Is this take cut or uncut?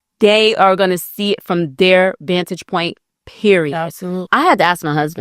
cut